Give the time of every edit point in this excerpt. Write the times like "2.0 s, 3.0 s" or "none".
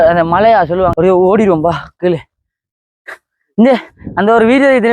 0.9 s